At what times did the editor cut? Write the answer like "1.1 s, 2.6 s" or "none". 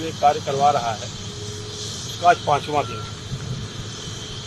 none